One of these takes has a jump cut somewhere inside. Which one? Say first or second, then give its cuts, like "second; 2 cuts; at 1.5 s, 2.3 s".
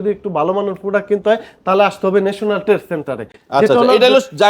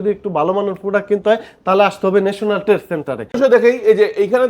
second; 1 cut; at 3.4 s